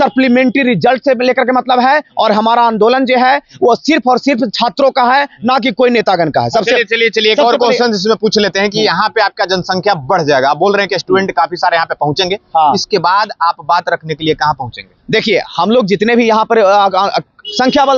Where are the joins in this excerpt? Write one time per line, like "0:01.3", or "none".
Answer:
none